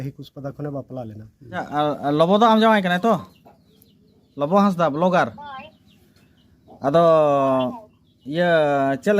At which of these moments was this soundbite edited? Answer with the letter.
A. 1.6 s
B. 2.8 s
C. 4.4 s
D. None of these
A